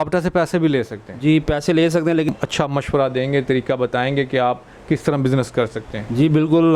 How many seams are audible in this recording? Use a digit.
1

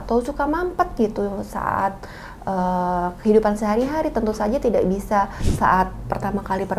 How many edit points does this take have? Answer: 1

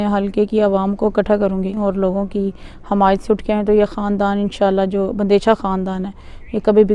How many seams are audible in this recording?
1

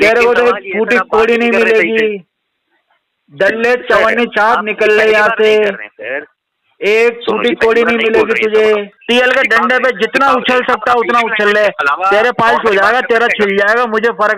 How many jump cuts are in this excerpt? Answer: 1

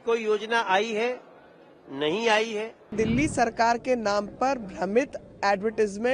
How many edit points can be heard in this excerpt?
1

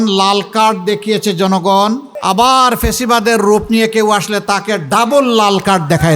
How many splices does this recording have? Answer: 1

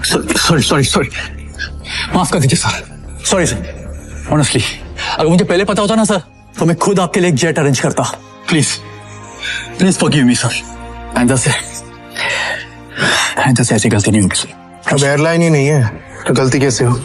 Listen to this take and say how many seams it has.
0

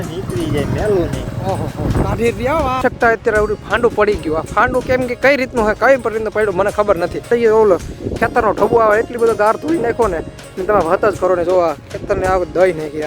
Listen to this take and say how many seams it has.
2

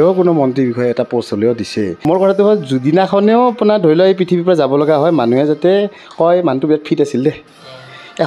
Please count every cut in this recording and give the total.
1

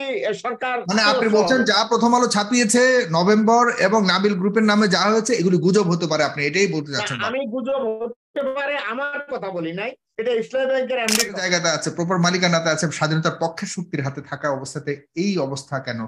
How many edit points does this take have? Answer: 1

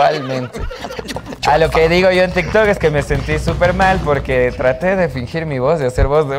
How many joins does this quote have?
0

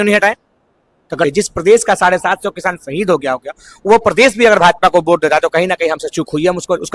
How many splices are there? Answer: 1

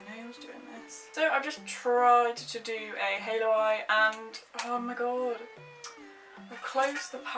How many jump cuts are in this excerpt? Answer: 1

